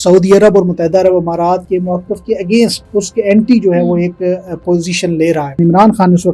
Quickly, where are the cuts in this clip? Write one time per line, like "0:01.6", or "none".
0:01.6
0:02.8
0:05.6